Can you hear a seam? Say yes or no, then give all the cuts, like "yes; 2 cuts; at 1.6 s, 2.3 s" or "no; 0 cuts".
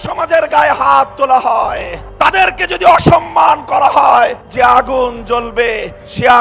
no; 0 cuts